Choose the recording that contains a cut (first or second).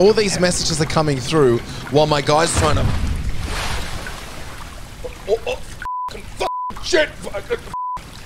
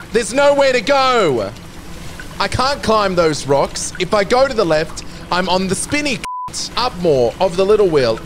second